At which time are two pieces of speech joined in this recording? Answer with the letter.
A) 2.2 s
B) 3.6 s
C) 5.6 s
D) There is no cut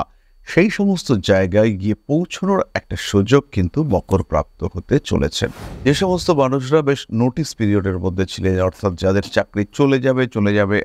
C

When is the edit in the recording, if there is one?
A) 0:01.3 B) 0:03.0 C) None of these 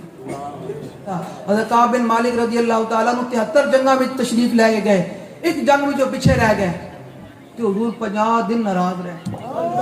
A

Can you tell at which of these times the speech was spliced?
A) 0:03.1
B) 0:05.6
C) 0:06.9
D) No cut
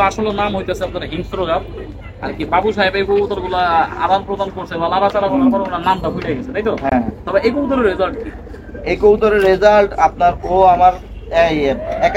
D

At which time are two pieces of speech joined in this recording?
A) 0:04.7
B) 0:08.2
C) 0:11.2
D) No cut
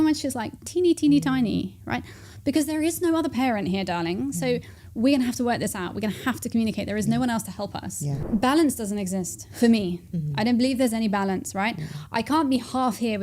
B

